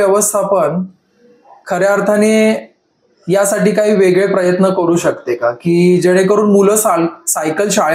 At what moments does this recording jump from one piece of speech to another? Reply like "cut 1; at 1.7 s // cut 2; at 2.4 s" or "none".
none